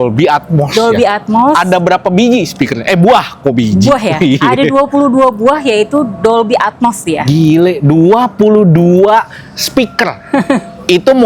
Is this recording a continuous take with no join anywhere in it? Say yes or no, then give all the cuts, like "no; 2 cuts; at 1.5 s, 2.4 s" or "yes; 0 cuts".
yes; 0 cuts